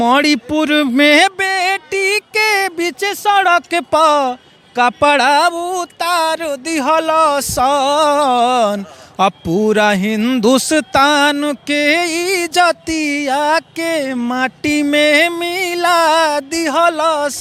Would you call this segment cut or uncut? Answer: uncut